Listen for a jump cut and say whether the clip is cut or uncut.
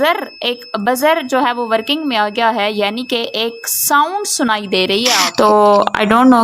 cut